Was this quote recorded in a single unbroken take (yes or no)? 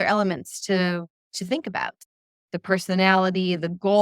no